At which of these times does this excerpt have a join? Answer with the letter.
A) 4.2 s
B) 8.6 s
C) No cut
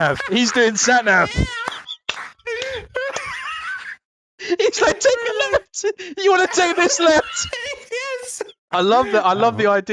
B